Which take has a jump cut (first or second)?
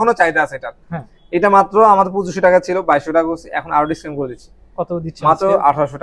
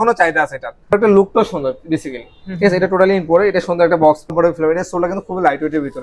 second